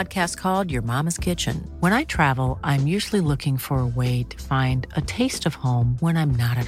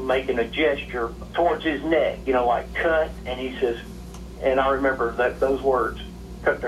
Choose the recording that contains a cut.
second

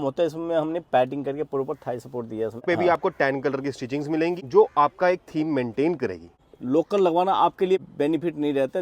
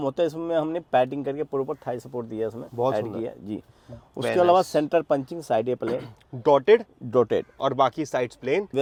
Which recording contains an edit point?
first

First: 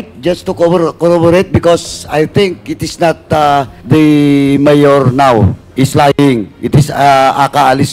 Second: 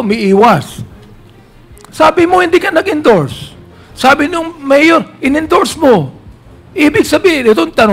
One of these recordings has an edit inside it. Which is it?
first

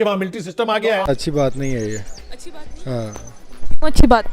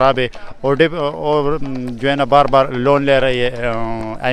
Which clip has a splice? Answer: first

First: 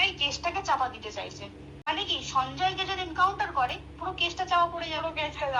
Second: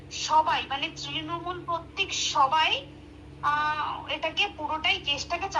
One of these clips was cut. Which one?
first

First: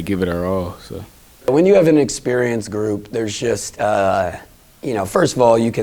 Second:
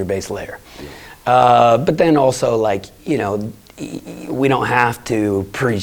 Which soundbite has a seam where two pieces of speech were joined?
first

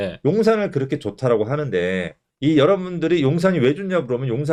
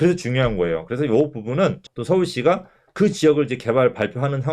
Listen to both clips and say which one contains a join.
second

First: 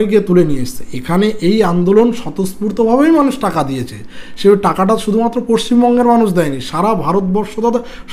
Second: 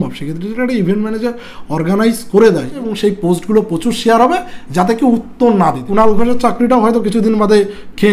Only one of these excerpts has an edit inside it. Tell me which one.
second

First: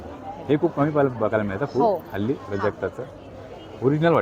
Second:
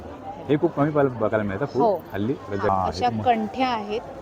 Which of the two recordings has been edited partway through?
second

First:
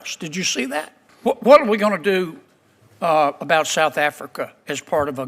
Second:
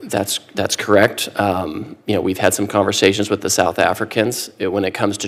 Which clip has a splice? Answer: first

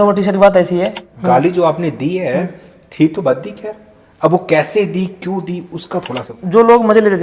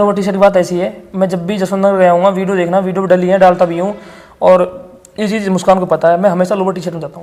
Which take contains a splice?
first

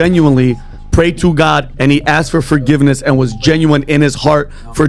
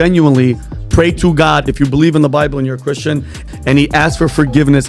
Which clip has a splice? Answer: second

